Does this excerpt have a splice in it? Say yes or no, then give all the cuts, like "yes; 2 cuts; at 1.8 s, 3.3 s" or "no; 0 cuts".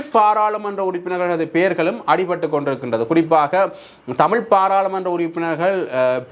no; 0 cuts